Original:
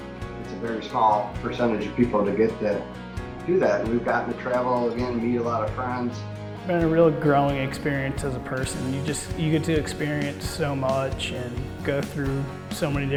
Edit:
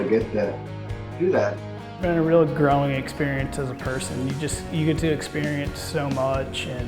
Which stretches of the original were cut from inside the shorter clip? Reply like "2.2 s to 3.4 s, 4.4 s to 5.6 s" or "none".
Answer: 3.8 s to 6.2 s